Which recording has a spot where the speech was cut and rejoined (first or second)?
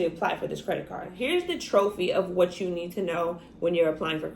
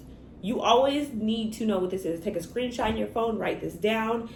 first